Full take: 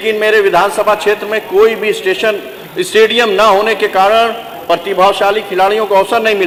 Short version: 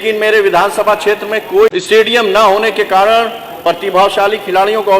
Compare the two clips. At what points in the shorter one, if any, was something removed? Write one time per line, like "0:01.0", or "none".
0:01.7